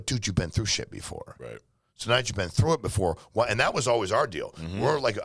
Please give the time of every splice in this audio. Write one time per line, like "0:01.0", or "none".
none